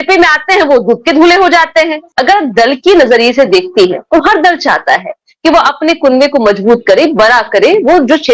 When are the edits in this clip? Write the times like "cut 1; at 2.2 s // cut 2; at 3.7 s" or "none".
cut 1; at 2.0 s